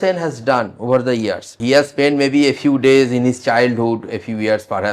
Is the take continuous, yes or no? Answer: no